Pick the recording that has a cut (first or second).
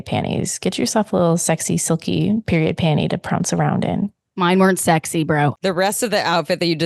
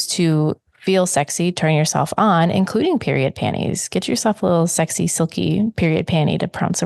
first